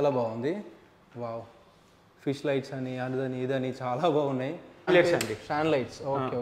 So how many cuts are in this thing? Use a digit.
1